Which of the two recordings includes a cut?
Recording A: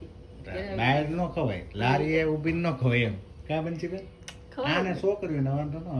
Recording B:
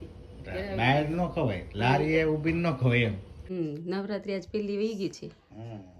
B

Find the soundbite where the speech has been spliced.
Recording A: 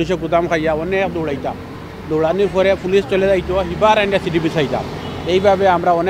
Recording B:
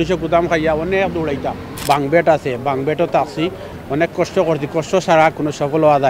B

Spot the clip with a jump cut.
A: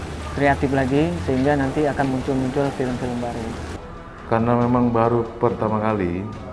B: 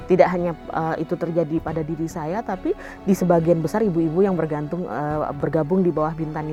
A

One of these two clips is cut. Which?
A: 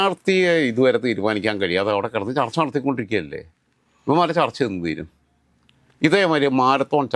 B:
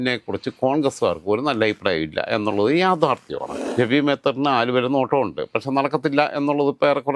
B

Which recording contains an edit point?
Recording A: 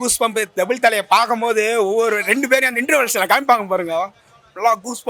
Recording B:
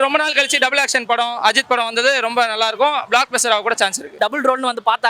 B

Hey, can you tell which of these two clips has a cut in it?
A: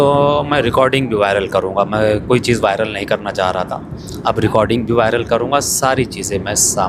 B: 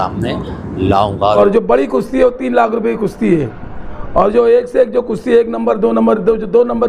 B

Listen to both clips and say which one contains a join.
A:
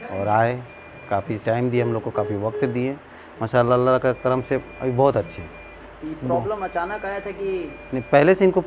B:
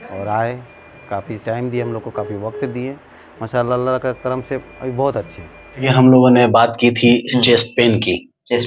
B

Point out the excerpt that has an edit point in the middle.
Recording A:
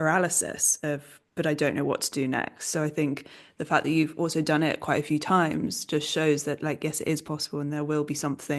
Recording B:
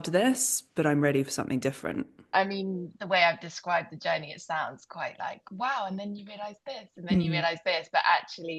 B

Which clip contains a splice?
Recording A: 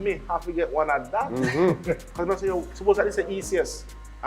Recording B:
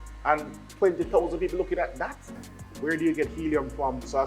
B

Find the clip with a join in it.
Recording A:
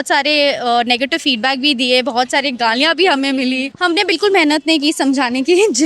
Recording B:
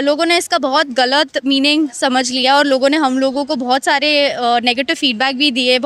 A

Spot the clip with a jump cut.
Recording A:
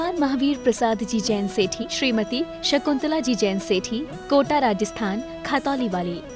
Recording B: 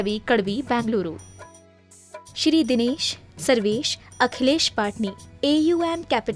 A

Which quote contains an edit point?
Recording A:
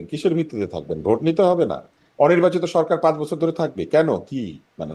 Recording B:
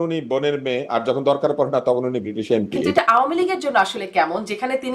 B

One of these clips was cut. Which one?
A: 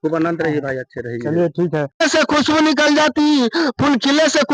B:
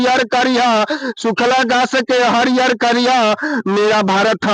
A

